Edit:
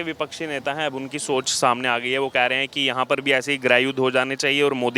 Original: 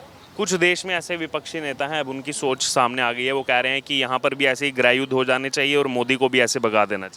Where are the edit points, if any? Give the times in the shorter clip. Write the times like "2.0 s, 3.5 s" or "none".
none